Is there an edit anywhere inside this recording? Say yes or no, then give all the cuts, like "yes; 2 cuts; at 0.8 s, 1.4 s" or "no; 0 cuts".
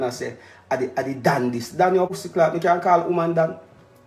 yes; 1 cut; at 2.2 s